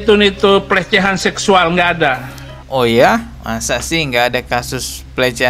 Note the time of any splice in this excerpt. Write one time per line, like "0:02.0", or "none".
none